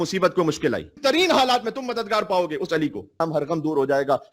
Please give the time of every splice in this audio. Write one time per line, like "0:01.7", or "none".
0:00.9
0:03.1